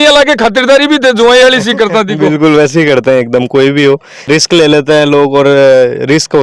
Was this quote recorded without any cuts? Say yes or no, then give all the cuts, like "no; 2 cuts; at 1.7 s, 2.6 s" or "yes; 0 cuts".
no; 1 cut; at 4.3 s